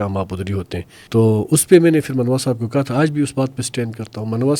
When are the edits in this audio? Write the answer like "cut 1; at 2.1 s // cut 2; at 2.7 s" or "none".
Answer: cut 1; at 0.9 s